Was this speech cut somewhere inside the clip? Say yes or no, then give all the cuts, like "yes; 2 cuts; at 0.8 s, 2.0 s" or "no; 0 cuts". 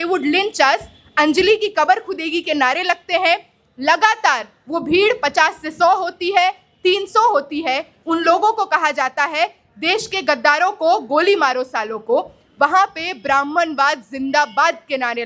yes; 1 cut; at 7.9 s